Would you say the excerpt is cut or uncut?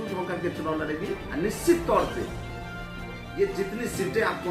uncut